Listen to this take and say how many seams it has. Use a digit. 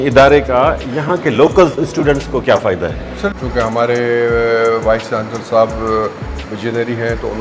1